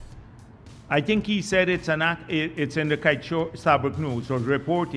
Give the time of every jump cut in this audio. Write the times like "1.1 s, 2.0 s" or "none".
none